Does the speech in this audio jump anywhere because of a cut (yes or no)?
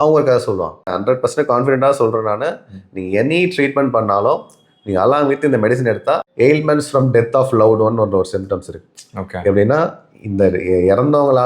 yes